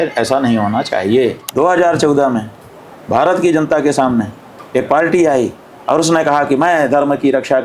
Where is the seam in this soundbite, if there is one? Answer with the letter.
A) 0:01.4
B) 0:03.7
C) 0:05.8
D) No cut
A